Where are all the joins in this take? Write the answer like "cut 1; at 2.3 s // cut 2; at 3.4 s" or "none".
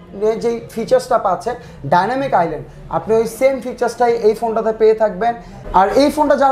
cut 1; at 5.5 s